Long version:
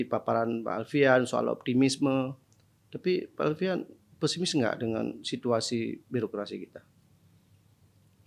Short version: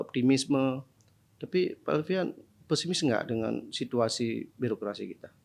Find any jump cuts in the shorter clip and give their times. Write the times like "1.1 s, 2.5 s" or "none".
none